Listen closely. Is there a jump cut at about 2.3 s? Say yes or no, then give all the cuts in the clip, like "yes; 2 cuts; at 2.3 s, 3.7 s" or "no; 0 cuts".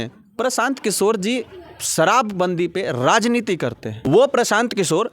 no; 1 cut; at 4.1 s